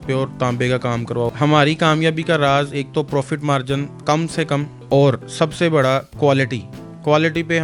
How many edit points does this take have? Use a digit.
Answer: 2